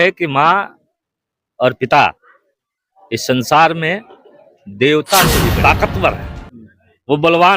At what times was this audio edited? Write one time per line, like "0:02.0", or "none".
0:05.6